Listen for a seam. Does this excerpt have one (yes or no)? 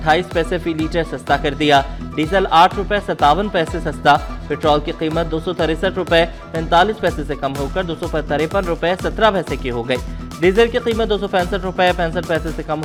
no